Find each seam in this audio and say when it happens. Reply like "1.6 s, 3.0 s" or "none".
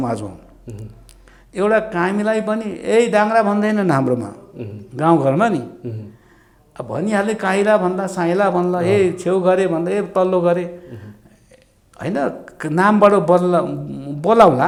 none